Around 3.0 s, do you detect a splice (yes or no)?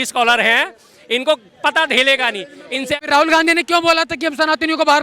yes